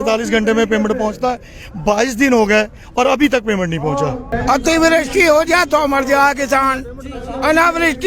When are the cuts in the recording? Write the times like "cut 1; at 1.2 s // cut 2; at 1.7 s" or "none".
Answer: cut 1; at 4.3 s